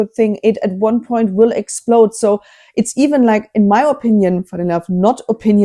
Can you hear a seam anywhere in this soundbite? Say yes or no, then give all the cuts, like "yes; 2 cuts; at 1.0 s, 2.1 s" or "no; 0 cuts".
no; 0 cuts